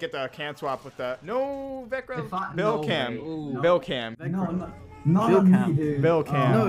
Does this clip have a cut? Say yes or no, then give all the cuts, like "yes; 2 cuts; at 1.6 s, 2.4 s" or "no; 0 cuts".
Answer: yes; 1 cut; at 1.2 s